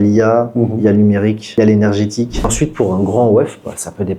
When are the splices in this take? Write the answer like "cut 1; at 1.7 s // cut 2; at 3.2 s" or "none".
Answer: cut 1; at 1.4 s // cut 2; at 2.5 s